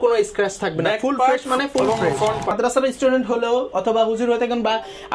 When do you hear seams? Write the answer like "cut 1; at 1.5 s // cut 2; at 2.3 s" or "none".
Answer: cut 1; at 2.5 s